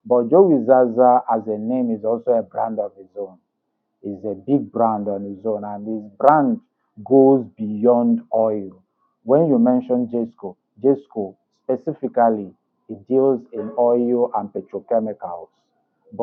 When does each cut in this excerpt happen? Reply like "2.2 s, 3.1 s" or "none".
none

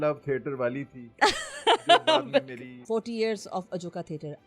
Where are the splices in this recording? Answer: 2.7 s

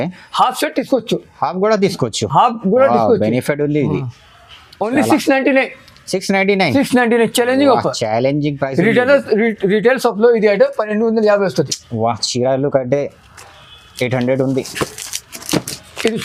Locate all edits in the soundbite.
none

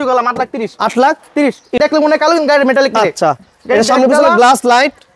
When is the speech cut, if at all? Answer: 1.8 s

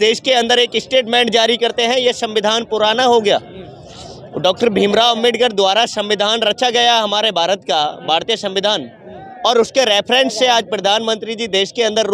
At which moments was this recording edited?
none

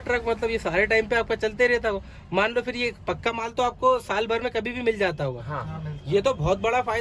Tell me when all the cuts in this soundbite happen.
none

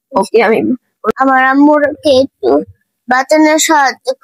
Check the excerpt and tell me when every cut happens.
1.1 s

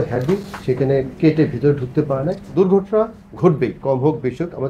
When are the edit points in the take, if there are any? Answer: 2.5 s

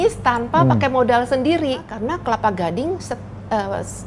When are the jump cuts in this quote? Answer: 1.9 s

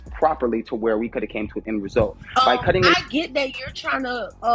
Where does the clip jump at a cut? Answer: 2.9 s

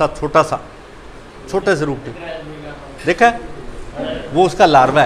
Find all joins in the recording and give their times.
none

